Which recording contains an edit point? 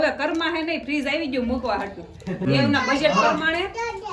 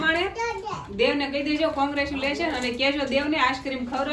first; 1 cut; at 2.5 s

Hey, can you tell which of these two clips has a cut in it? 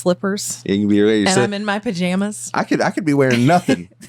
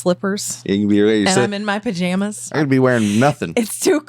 second; 1 cut; at 2.5 s

